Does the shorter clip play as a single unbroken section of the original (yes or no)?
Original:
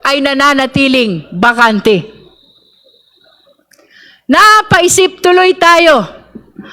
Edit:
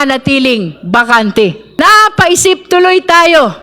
no